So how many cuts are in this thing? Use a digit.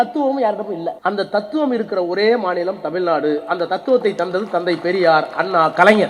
1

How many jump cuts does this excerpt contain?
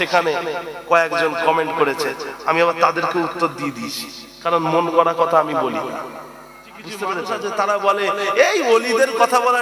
1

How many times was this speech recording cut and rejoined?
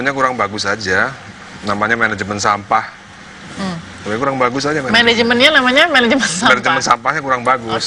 1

